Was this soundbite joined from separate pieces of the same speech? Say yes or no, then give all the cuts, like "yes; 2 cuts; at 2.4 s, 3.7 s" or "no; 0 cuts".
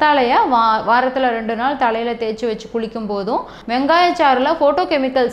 yes; 1 cut; at 3.6 s